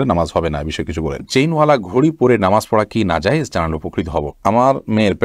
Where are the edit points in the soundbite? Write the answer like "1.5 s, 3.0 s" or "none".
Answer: 1.2 s, 4.4 s